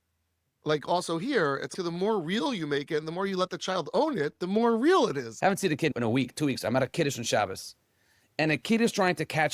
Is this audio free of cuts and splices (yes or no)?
no